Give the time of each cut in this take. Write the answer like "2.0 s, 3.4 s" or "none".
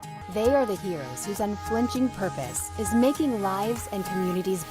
3.6 s